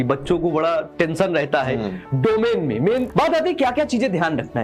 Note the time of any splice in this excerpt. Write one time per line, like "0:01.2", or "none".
0:03.1